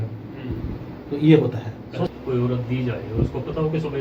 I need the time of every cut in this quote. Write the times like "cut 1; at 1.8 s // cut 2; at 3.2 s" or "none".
cut 1; at 2.1 s